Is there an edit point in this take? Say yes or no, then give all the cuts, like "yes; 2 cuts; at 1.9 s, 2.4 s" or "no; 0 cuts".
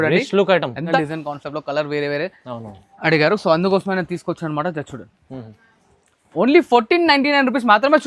yes; 1 cut; at 0.9 s